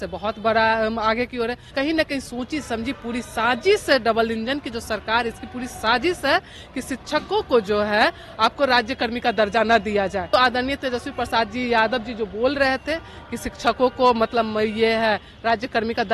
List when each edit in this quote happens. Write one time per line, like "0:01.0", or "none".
0:01.7
0:10.3